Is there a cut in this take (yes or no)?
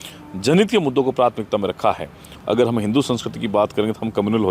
yes